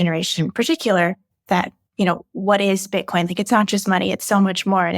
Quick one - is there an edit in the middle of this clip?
yes; 1 cut; at 1.2 s

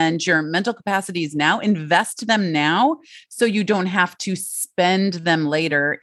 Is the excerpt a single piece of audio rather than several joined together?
yes; 0 cuts

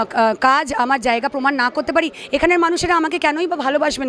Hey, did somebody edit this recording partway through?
no; 0 cuts

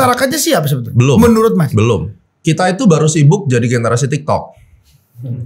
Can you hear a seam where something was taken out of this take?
yes; 1 cut; at 2.4 s

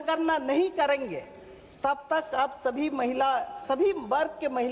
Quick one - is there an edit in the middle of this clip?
no; 0 cuts

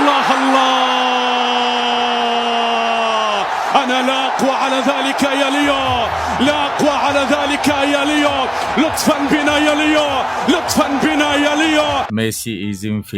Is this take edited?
yes; 1 cut; at 12.1 s

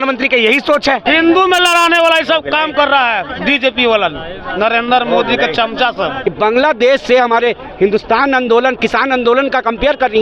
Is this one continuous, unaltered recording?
no; 2 cuts; at 1.0 s, 6.2 s

